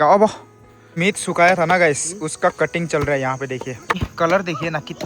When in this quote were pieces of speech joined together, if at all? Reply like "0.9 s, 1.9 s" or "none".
1.0 s, 4.0 s